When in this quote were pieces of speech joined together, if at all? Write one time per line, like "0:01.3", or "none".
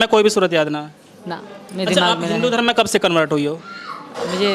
none